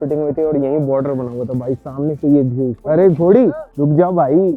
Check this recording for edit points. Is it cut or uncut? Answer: cut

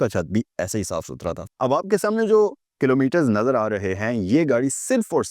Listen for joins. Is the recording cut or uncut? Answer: cut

